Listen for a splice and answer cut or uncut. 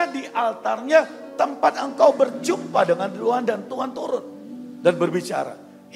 uncut